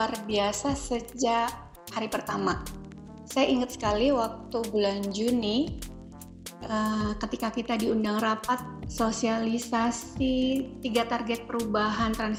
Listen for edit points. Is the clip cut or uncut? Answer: uncut